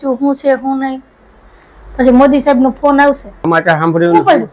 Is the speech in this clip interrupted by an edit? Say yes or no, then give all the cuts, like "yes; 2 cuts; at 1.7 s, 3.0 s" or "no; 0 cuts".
yes; 1 cut; at 3.4 s